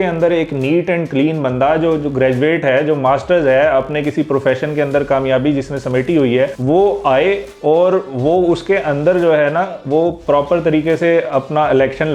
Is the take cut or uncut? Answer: uncut